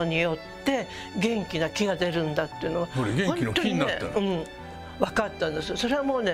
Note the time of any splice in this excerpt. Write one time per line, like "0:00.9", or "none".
none